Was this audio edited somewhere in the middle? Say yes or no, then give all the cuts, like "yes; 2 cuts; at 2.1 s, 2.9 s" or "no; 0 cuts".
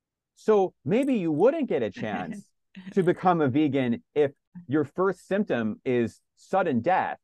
yes; 1 cut; at 4.5 s